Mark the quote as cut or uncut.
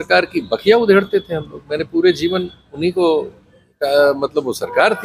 uncut